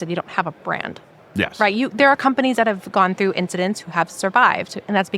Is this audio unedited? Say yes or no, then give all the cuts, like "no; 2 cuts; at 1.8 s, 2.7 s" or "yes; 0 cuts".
yes; 0 cuts